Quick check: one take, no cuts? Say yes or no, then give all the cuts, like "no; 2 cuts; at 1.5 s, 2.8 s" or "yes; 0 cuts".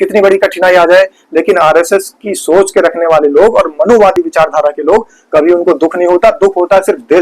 yes; 0 cuts